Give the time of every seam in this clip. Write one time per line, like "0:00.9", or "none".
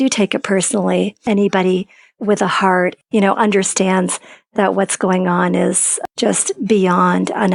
0:01.2
0:03.0
0:06.0